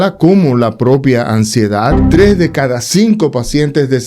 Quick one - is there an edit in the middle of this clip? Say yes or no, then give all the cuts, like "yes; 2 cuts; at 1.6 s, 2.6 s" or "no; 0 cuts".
yes; 1 cut; at 2.0 s